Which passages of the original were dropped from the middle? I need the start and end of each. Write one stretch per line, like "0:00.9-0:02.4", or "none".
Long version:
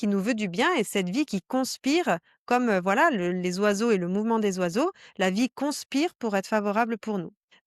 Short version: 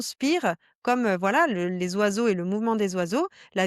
none